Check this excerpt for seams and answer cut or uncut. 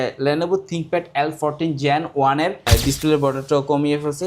cut